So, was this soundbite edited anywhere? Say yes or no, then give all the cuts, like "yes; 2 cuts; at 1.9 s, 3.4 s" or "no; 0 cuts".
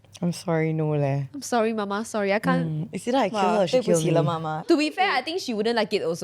yes; 1 cut; at 5.0 s